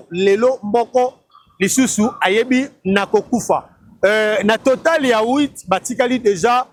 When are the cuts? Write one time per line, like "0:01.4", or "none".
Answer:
none